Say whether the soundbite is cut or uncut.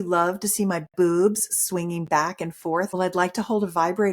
cut